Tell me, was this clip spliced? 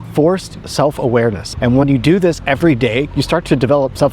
yes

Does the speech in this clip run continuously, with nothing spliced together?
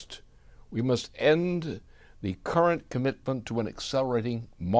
yes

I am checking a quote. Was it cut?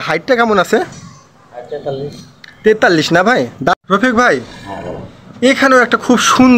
yes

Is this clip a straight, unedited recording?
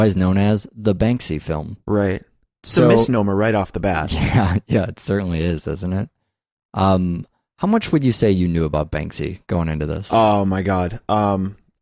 no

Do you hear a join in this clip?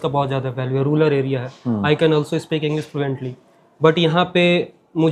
no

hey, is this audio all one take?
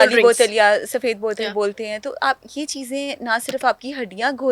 yes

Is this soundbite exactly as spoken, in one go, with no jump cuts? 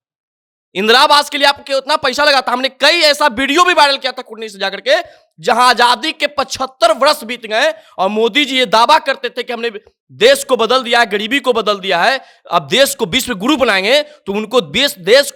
yes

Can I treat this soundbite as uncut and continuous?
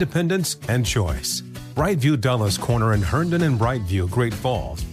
yes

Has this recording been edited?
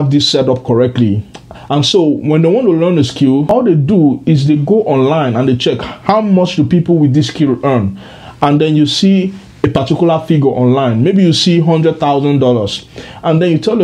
yes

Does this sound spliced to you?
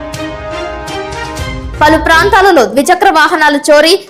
yes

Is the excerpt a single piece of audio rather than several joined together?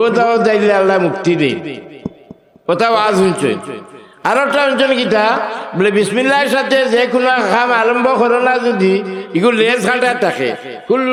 yes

